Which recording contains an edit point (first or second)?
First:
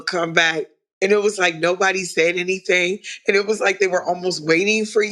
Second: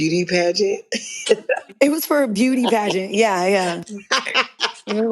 second